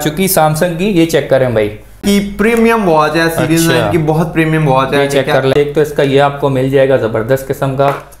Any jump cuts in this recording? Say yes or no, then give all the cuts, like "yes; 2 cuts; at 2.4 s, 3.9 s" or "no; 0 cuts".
yes; 2 cuts; at 2.0 s, 5.5 s